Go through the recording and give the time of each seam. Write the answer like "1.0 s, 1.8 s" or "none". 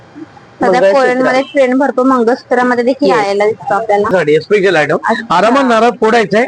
4.1 s